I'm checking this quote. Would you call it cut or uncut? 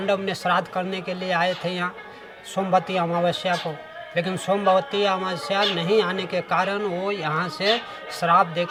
uncut